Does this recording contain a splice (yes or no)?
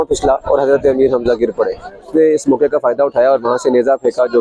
yes